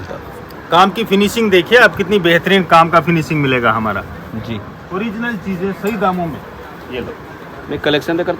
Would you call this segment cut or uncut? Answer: uncut